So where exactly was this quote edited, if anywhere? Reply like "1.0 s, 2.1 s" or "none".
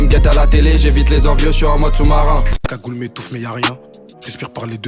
2.5 s